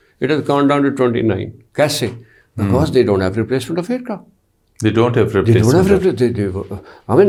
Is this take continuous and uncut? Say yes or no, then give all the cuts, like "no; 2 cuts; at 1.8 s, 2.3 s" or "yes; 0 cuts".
yes; 0 cuts